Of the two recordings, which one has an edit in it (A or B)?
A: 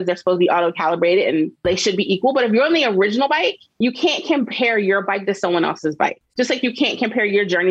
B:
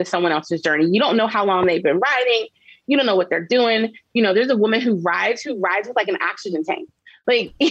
A